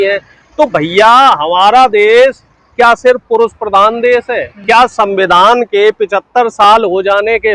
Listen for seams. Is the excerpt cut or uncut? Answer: uncut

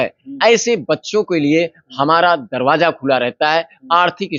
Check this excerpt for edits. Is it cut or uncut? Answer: uncut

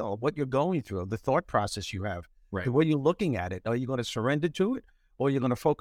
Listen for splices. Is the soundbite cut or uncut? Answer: uncut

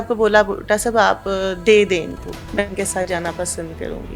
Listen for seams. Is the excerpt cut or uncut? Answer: cut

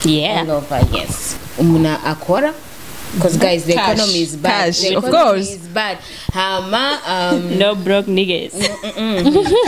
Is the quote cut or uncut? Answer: cut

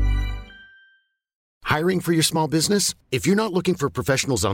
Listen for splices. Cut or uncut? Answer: cut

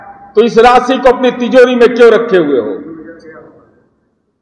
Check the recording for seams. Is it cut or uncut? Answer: uncut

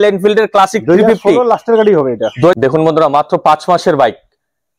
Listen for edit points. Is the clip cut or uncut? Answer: cut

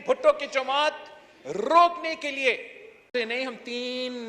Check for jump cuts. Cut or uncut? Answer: cut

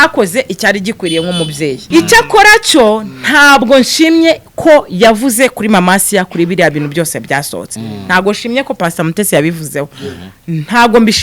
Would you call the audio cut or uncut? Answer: cut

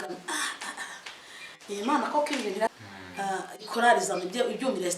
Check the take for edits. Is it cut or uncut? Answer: cut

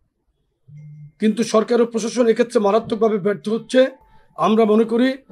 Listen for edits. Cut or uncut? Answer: uncut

